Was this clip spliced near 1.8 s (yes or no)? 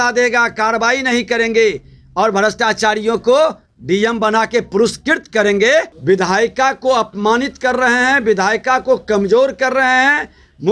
no